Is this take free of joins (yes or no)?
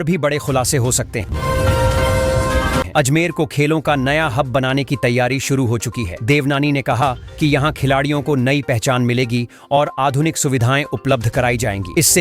no